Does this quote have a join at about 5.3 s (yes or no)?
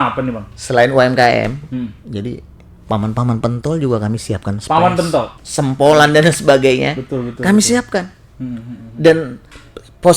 yes